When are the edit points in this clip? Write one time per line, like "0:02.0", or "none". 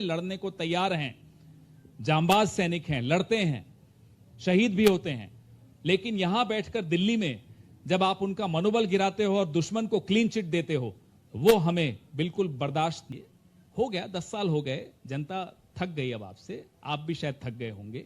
0:13.0